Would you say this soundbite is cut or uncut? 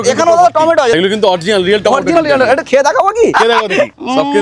cut